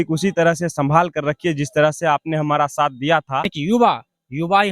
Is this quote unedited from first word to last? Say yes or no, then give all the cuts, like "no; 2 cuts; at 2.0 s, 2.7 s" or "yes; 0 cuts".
no; 1 cut; at 3.5 s